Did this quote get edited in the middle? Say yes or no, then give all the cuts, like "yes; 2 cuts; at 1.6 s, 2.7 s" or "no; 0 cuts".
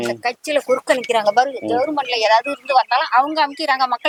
no; 0 cuts